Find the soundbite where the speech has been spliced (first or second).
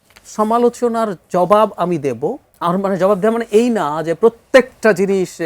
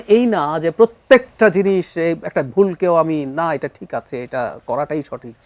first